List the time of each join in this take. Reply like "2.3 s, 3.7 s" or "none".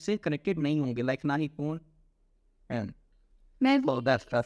none